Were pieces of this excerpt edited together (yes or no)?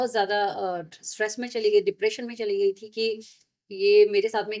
no